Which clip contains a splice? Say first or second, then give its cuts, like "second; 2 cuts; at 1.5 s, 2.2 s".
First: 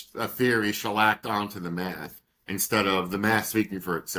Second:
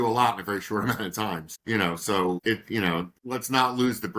second; 3 cuts; at 1.5 s, 2.4 s, 3.2 s